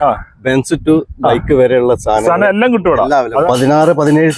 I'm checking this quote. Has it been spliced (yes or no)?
yes